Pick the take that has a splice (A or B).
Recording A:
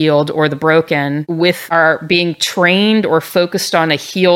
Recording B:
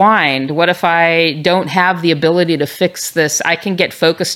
A